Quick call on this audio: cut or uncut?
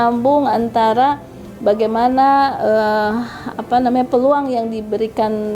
uncut